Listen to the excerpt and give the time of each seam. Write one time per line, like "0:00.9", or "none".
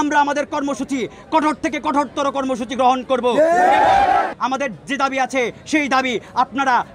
0:04.3